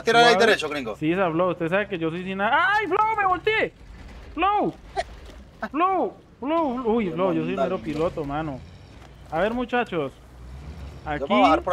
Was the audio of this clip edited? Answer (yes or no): no